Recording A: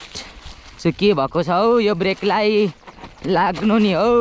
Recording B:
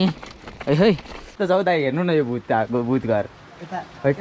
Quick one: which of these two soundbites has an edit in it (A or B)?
B